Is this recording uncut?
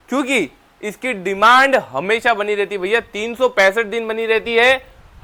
yes; 0 cuts

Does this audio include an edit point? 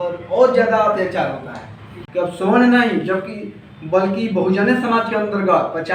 yes; 1 cut; at 2.0 s

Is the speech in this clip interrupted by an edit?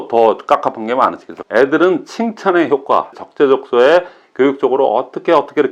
yes; 2 cuts; at 1.3 s, 3.2 s

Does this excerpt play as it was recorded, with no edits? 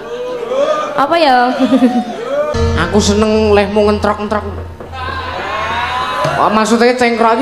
no; 1 cut; at 2.5 s

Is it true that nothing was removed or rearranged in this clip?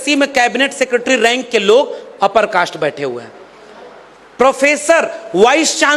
yes; 0 cuts

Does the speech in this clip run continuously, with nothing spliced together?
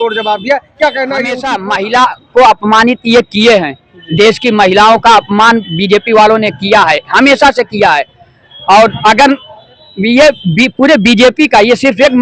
no; 1 cut; at 1.5 s

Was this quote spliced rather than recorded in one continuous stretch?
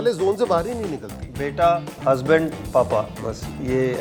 no; 0 cuts

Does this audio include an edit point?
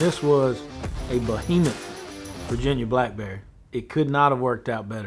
no; 0 cuts

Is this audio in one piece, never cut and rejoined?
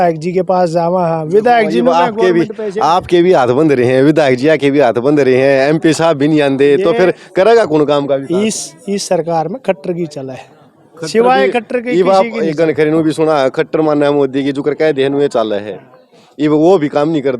yes; 0 cuts

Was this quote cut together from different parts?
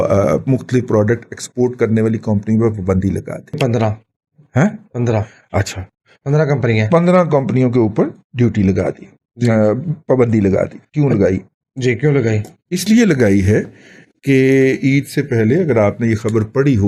yes; 1 cut; at 3.6 s

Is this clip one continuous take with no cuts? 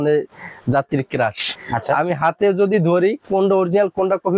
no; 1 cut; at 1.5 s

